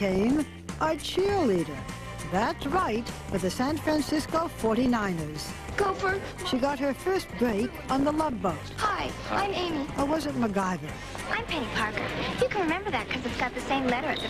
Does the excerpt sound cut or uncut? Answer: cut